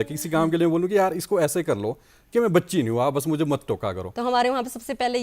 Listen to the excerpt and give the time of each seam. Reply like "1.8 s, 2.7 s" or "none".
4.0 s